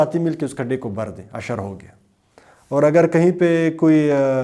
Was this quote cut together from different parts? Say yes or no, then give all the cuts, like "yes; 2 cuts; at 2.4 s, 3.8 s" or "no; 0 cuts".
no; 0 cuts